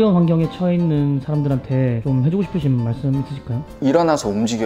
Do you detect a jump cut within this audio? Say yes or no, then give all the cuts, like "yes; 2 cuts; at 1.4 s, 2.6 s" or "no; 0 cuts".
no; 0 cuts